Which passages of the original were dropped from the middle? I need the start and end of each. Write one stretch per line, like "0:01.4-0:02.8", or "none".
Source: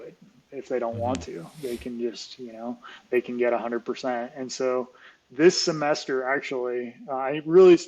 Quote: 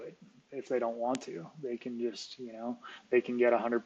none

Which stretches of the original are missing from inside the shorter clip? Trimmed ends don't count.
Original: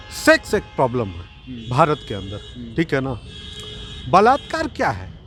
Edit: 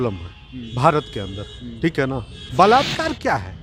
0:03.3-0:03.9

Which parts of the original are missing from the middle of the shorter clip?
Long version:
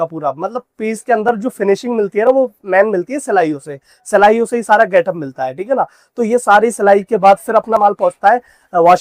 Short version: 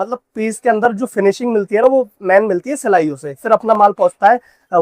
0:04.1-0:07.7

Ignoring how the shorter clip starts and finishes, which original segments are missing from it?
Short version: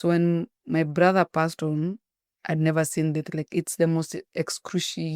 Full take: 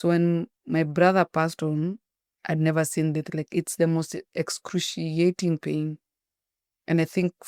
none

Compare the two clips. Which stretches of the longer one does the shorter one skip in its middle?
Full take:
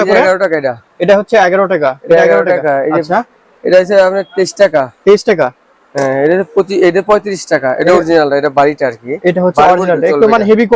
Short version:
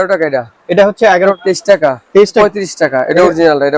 0:01.7-0:04.3
0:05.3-0:07.1

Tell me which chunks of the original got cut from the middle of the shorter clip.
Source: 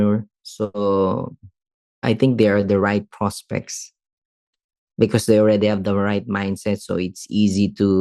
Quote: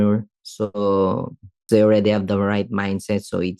0:01.7-0:05.2

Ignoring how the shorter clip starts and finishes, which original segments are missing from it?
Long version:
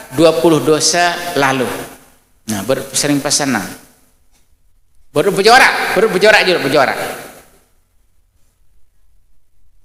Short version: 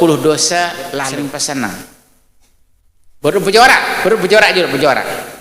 0:01.4-0:02.9

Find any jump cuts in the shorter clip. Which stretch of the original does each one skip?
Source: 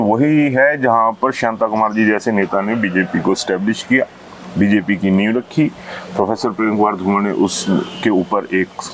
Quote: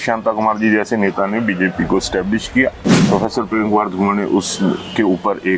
0:04.2-0:06.0

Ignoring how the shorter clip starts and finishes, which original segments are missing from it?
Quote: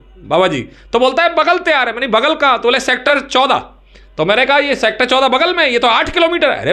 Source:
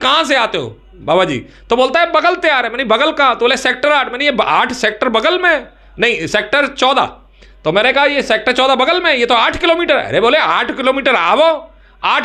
0:03.9-0:06.6

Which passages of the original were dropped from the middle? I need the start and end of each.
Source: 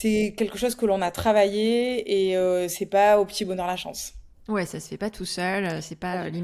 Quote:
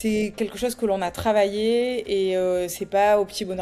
none

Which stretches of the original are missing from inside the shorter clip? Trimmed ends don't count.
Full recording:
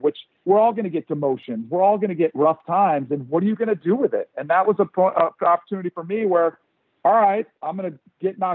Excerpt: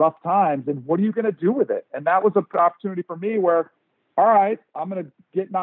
0:04.9-0:05.3

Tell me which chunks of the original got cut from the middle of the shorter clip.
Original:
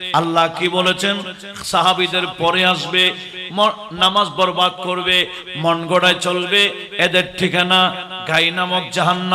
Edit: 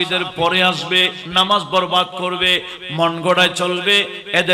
0:03.2-0:03.9

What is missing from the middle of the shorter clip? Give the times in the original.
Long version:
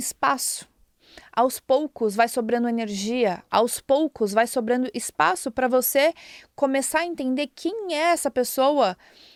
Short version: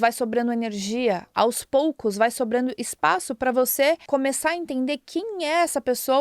0:06.2-0:06.5

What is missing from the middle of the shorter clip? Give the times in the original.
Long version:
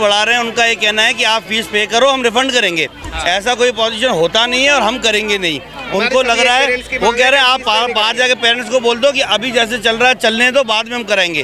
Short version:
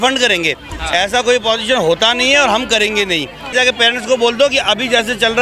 0:05.8-0:08.1

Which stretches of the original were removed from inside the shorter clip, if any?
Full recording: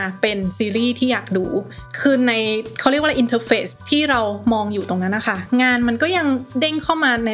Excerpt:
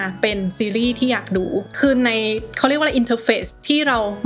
0:01.7-0:01.9

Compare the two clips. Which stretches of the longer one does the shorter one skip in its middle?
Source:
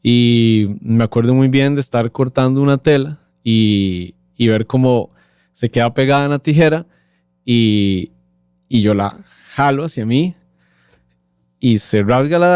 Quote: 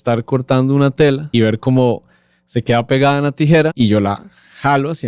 0:03.1-0:04.3
0:06.8-0:08.7

